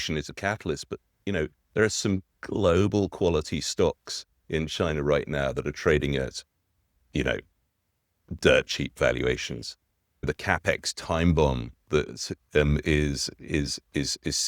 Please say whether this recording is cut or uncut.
cut